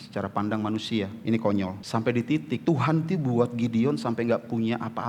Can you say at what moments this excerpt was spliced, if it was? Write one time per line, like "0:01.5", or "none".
0:01.2
0:01.8
0:02.6